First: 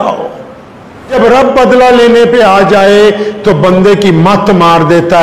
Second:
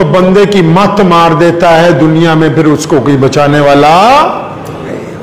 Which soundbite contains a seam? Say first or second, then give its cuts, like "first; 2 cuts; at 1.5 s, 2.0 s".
first; 1 cut; at 1.1 s